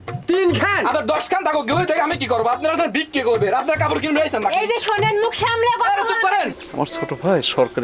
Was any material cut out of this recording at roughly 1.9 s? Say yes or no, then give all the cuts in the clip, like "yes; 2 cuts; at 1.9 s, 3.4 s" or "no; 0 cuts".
no; 1 cut; at 6.5 s